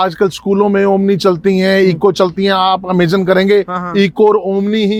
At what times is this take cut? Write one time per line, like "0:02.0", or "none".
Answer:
none